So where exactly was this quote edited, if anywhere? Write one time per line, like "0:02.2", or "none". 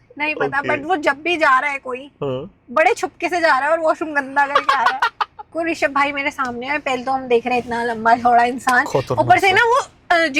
0:05.4